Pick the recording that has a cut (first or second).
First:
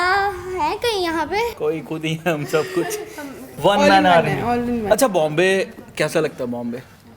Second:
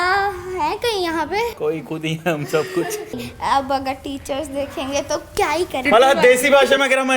second